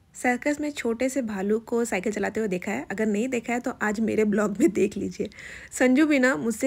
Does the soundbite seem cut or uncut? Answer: uncut